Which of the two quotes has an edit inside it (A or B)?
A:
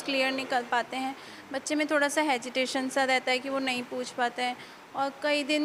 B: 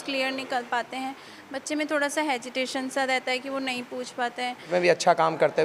B